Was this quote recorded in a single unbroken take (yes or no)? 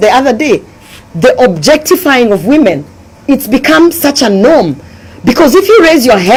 yes